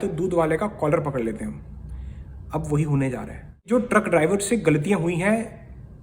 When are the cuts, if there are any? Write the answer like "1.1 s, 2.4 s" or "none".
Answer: 3.7 s